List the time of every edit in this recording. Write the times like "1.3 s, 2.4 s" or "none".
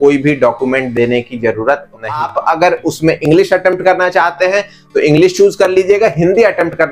2.3 s